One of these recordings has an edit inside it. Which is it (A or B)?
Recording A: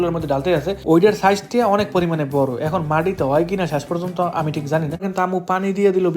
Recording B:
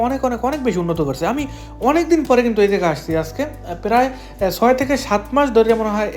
A